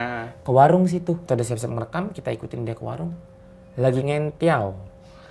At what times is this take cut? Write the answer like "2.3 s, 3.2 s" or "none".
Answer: 1.2 s